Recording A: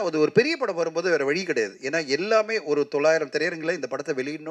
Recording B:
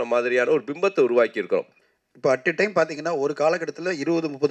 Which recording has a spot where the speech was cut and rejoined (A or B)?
B